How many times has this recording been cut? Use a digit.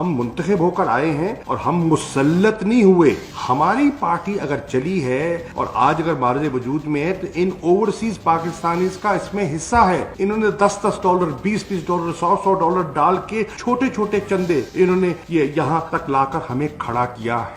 2